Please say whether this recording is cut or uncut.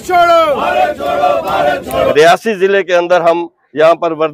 cut